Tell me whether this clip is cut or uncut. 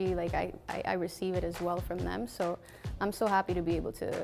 uncut